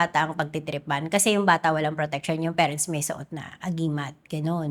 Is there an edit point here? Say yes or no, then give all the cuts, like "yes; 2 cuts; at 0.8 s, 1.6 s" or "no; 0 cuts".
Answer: no; 0 cuts